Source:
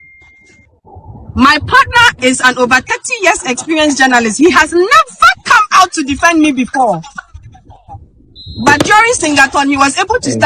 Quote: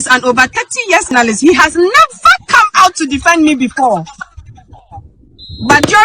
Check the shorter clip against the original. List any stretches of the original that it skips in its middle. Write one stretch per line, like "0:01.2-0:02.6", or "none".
0:03.5-0:04.1

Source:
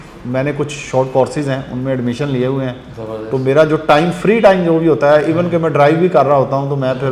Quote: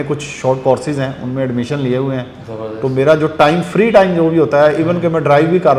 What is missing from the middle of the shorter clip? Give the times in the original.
none

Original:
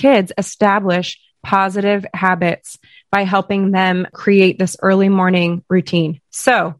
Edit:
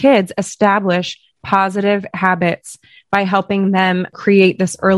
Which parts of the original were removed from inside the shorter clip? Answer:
none

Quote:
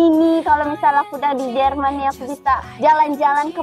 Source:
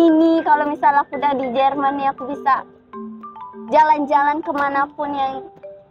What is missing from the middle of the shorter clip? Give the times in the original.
0:02.7-0:03.6

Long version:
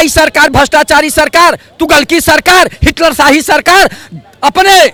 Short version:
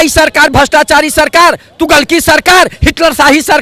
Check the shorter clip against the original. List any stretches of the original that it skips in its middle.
none

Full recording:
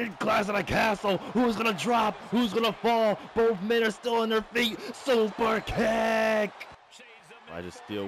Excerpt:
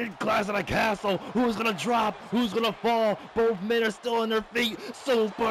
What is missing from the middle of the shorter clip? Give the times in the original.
none

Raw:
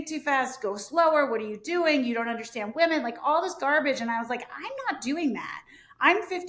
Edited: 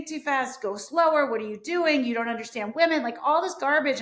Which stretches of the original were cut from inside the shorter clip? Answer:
none

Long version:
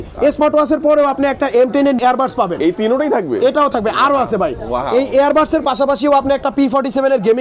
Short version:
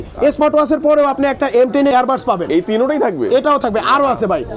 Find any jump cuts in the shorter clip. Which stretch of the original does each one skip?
0:01.9-0:02.0

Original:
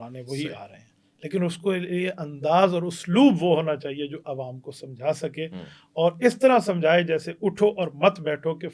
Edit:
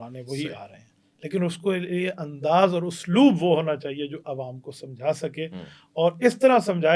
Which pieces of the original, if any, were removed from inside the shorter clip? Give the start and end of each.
none

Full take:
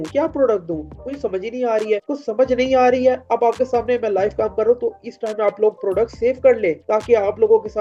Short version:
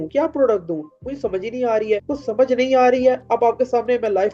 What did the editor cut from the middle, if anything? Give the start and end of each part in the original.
none

